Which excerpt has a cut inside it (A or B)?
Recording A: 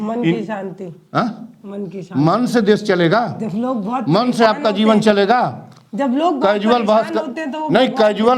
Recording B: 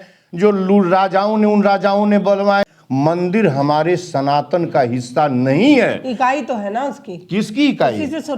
B